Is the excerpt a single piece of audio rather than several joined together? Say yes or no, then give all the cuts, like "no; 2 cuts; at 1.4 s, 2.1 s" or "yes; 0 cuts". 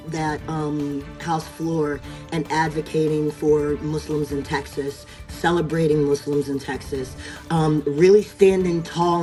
yes; 0 cuts